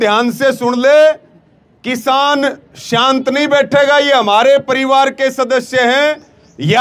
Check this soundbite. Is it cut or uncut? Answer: uncut